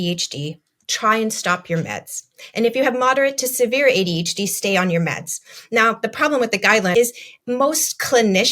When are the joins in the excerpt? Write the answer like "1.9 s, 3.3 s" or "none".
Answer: 6.9 s